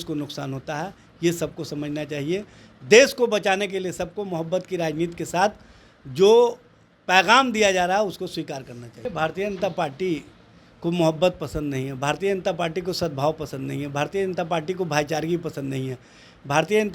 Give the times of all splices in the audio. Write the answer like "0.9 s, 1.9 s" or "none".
9.0 s